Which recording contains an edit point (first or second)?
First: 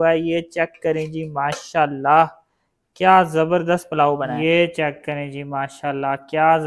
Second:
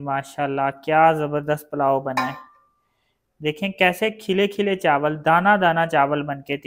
first